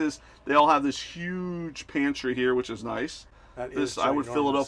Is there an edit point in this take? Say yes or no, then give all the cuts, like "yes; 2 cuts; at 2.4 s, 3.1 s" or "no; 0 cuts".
no; 0 cuts